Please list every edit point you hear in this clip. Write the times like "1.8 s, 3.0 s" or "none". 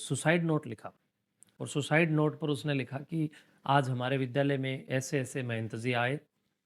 none